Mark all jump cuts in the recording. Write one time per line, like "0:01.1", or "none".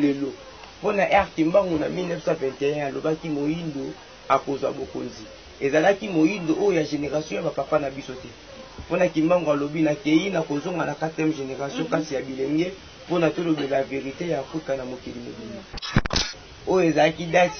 0:16.0